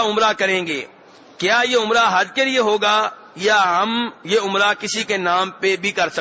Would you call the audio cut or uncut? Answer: uncut